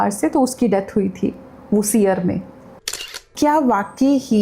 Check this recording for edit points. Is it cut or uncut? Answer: cut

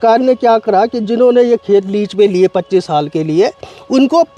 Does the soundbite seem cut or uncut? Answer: uncut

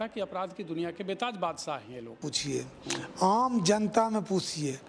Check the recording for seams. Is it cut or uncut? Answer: cut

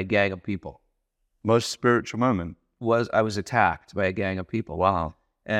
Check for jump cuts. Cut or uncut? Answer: uncut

